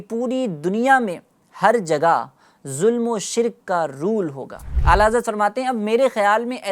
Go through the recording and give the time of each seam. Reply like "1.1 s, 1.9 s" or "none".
4.7 s